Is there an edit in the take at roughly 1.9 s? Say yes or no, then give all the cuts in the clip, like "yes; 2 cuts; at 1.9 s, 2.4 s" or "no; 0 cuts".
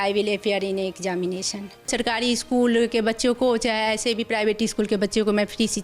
yes; 1 cut; at 1.9 s